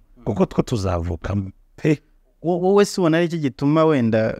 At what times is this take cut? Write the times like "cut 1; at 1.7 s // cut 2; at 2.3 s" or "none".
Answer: none